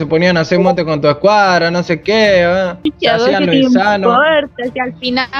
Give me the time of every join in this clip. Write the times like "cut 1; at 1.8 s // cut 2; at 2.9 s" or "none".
cut 1; at 2.7 s